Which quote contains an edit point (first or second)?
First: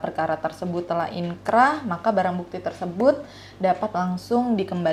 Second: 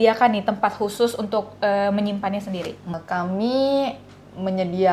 second